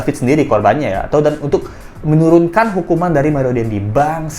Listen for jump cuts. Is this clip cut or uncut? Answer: uncut